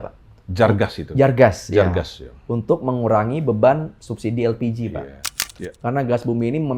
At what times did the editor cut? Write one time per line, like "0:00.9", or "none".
0:05.5